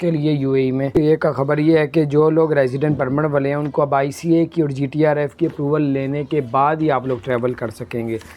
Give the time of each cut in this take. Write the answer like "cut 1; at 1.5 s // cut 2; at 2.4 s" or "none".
cut 1; at 1.0 s